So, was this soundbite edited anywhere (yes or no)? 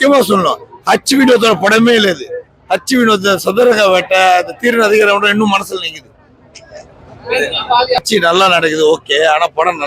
yes